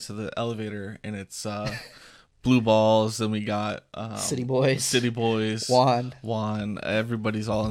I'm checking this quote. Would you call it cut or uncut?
uncut